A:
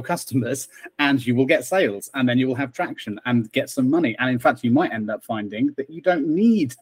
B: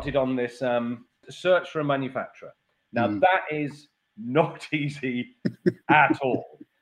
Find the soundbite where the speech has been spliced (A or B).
B